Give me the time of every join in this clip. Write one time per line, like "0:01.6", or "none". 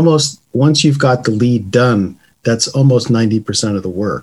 none

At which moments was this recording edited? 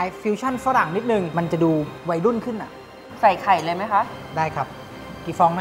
0:01.3
0:03.0

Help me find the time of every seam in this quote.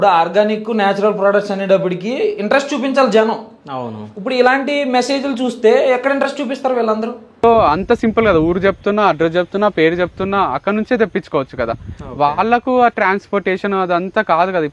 0:07.3

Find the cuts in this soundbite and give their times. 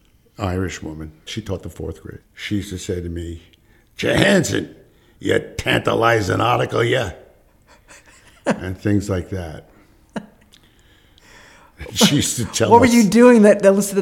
0:02.2

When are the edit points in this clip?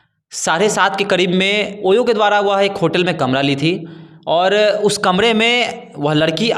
0:01.7

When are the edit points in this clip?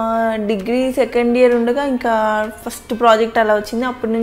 none

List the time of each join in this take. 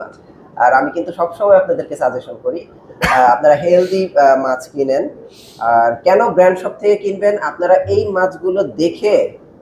none

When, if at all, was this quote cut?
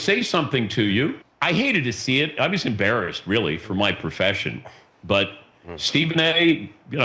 0:01.3

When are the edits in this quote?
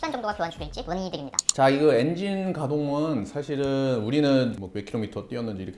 none

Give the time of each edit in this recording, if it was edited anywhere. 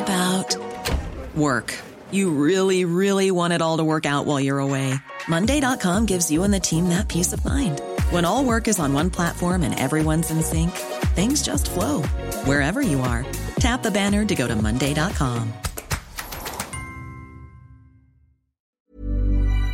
0:18.7

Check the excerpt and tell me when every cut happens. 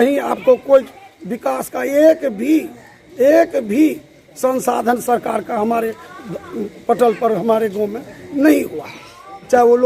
none

